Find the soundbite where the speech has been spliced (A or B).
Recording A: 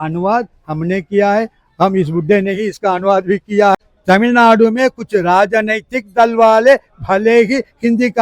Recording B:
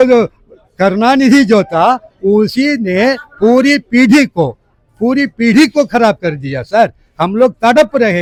A